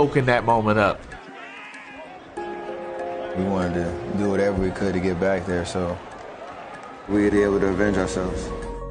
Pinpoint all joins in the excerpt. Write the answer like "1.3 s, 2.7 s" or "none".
6.5 s